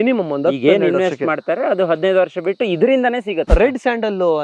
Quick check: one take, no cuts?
no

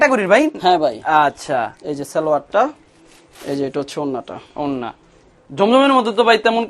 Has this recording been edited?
no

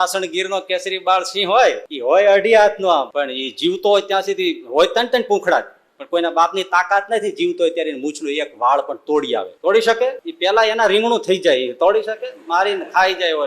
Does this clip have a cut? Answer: yes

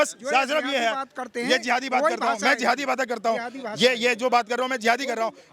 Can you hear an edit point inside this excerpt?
no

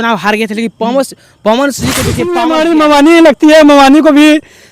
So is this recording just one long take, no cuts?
no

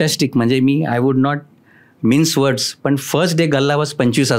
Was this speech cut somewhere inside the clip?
no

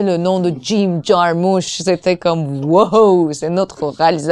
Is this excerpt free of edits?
yes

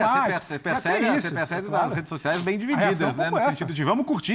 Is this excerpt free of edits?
yes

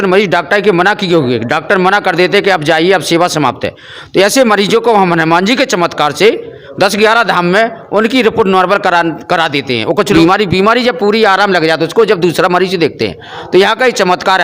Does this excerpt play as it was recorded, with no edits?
no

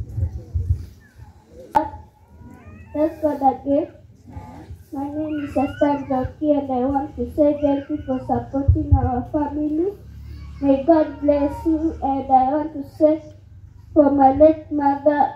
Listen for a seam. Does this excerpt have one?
yes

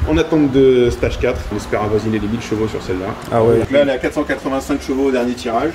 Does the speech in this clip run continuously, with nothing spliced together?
no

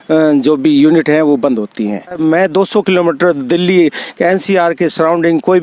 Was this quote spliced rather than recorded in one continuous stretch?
yes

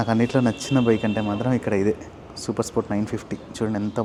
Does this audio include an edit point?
no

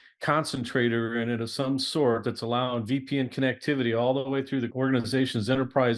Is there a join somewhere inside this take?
yes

